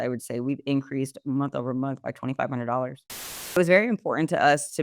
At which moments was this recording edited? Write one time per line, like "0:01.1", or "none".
0:03.2